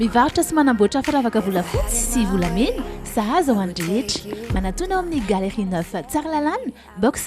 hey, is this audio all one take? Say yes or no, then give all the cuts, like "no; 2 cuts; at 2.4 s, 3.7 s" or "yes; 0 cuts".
yes; 0 cuts